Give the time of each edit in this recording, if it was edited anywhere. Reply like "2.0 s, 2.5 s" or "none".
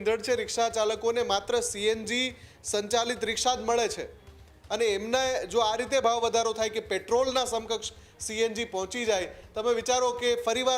none